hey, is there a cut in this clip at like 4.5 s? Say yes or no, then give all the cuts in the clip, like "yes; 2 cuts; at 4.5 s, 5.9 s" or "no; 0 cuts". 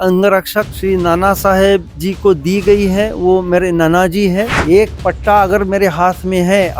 yes; 1 cut; at 4.5 s